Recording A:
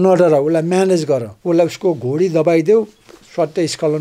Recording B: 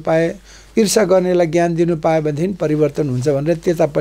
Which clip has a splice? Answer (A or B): A